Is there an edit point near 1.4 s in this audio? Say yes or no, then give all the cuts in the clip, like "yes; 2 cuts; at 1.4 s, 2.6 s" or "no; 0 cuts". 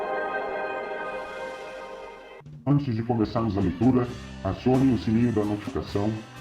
yes; 1 cut; at 1.4 s